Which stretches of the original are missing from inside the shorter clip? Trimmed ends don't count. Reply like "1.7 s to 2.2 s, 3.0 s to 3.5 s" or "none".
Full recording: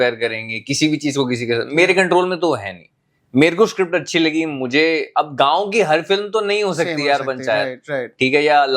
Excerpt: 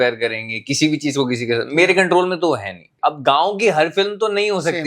2.9 s to 5.1 s